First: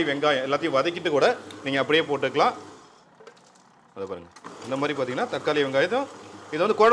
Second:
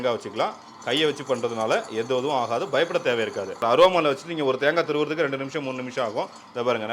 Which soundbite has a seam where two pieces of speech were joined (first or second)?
second